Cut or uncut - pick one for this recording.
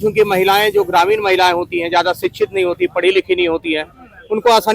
uncut